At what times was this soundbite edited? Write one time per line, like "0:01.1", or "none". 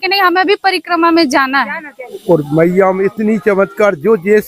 0:02.2